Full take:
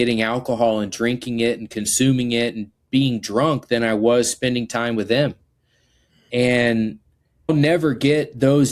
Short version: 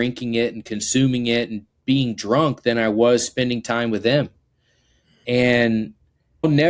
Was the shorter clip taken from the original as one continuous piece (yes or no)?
yes